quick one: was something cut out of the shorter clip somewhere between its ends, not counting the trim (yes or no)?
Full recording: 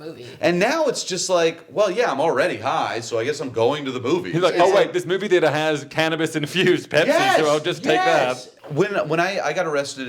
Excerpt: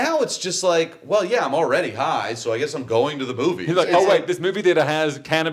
no